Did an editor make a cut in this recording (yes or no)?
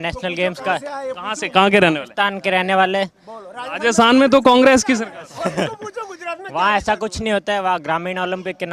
no